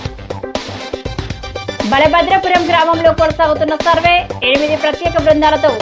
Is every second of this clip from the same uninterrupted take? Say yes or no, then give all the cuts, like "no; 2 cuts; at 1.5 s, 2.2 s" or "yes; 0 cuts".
no; 1 cut; at 1.6 s